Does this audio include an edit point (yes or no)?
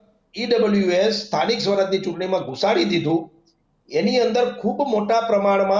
no